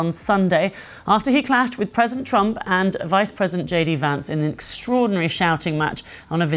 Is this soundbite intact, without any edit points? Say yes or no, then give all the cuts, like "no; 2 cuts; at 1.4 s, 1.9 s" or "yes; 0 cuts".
yes; 0 cuts